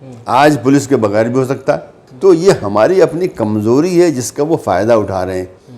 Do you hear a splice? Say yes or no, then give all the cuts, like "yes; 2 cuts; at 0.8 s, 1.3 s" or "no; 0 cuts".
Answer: yes; 1 cut; at 2.0 s